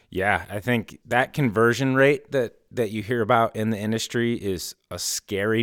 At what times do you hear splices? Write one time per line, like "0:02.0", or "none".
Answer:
0:00.9